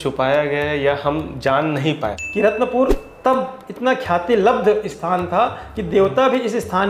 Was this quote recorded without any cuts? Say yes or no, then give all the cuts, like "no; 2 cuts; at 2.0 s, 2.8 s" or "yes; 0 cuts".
no; 1 cut; at 2.0 s